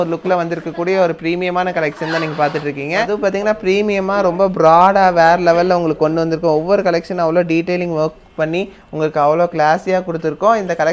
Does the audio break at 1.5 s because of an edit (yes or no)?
no